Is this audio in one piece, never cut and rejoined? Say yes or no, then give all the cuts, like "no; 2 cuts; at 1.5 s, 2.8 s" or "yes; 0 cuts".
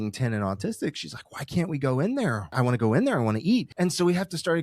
no; 2 cuts; at 2.5 s, 3.7 s